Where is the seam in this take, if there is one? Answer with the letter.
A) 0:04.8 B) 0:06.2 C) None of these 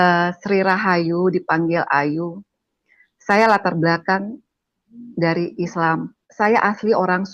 B